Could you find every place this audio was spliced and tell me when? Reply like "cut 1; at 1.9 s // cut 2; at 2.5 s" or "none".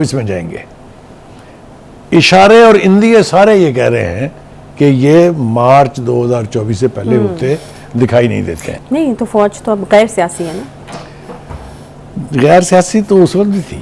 cut 1; at 8.7 s

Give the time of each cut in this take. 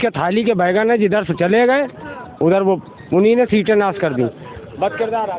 none

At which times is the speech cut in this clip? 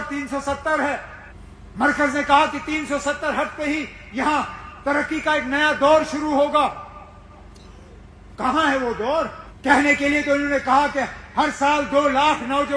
cut 1; at 9.4 s

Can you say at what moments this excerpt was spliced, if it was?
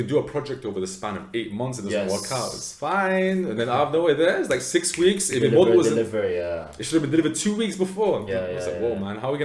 none

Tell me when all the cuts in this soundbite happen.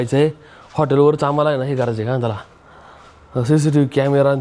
none

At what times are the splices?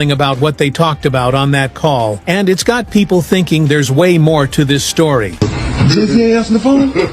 cut 1; at 5.4 s

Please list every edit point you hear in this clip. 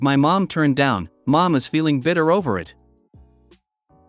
cut 1; at 3.1 s

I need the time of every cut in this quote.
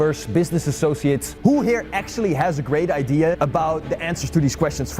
cut 1; at 1.3 s // cut 2; at 3.4 s

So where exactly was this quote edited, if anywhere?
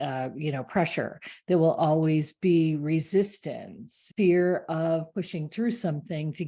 cut 1; at 4.0 s

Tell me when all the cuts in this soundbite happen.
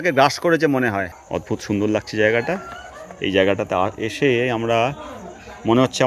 cut 1; at 1.1 s

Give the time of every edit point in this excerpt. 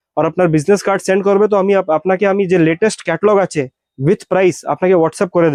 none

